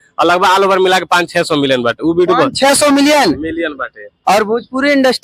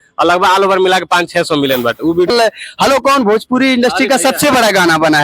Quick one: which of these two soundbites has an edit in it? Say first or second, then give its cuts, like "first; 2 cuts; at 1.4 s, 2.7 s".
second; 1 cut; at 2.3 s